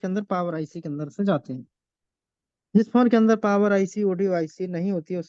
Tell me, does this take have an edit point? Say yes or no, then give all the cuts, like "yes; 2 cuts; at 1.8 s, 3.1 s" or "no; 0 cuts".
no; 0 cuts